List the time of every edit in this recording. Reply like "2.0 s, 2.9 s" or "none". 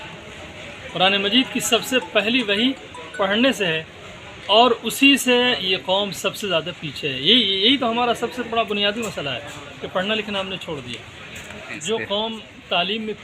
11.7 s